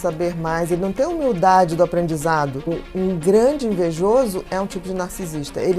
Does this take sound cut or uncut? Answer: cut